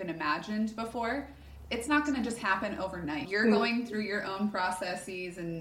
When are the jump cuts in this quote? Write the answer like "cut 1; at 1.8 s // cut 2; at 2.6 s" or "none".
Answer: cut 1; at 3.2 s